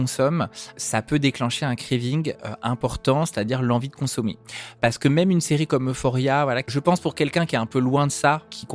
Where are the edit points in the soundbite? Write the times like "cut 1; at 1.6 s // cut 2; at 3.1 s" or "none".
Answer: cut 1; at 0.8 s // cut 2; at 4.8 s // cut 3; at 6.7 s